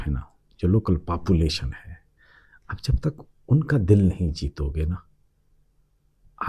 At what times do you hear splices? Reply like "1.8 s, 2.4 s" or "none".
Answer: none